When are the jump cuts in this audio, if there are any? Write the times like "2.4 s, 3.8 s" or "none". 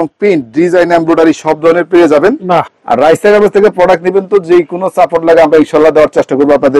2.7 s